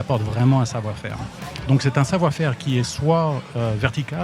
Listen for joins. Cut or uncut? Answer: uncut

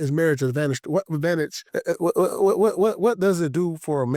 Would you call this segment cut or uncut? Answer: cut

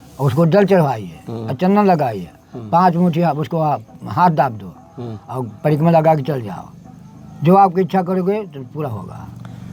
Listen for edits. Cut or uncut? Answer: uncut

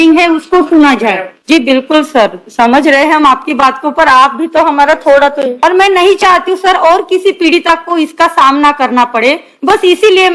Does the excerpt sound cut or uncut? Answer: cut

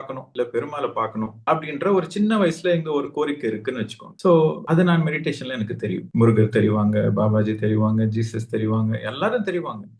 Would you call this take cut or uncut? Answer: uncut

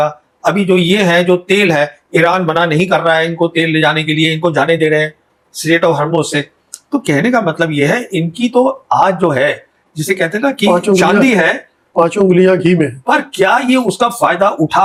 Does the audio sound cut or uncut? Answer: uncut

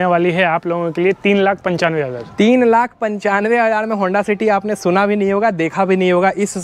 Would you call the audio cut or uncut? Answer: uncut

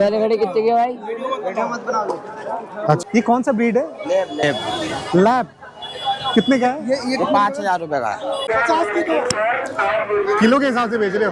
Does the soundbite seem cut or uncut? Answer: cut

